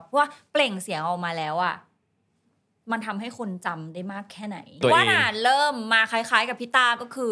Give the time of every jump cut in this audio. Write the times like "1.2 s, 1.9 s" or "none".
4.8 s